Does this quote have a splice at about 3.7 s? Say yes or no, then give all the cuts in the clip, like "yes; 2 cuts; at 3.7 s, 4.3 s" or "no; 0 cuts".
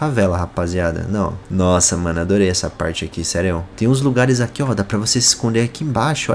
yes; 2 cuts; at 1.4 s, 3.7 s